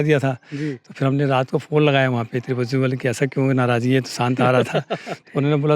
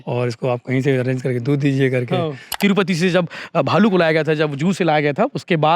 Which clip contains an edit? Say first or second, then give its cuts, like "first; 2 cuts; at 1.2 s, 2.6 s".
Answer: second; 1 cut; at 2.5 s